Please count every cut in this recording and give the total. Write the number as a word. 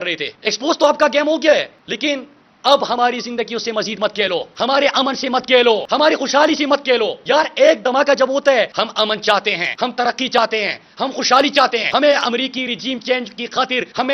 two